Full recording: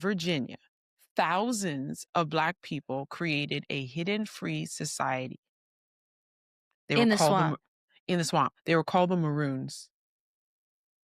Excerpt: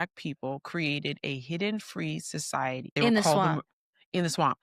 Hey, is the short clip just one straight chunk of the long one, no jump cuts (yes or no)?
no